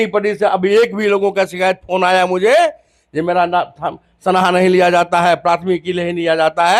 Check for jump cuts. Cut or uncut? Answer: uncut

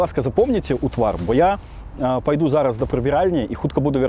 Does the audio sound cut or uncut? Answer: uncut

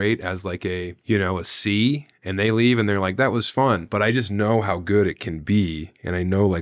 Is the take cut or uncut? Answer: cut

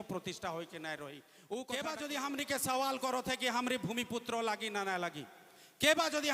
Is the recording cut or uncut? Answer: cut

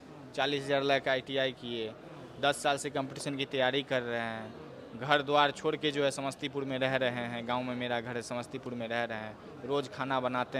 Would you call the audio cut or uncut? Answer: uncut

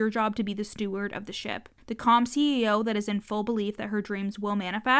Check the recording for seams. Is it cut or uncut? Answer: cut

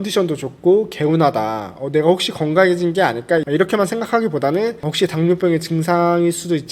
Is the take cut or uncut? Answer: uncut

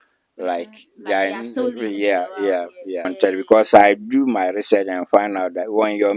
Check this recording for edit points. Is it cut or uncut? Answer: cut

